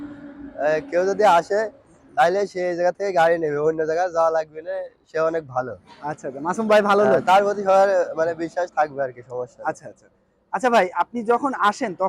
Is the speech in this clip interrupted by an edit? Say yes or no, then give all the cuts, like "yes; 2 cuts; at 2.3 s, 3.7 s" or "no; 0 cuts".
no; 0 cuts